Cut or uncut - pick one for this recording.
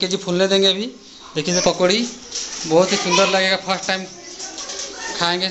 cut